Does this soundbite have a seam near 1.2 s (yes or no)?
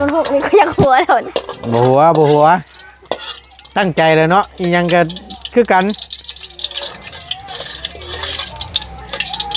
no